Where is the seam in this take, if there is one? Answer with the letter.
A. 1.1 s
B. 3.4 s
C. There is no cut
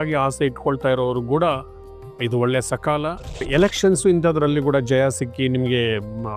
B